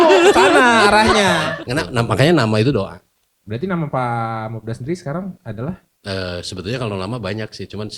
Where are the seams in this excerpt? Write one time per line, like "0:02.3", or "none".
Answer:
0:01.5